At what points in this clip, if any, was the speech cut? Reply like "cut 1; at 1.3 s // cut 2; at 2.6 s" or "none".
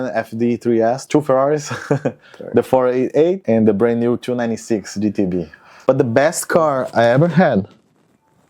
cut 1; at 1.0 s // cut 2; at 3.4 s // cut 3; at 5.6 s